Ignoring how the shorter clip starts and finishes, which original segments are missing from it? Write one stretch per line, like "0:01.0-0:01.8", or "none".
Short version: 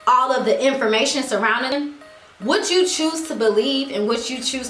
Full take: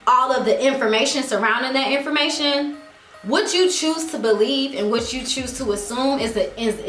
0:01.7-0:02.5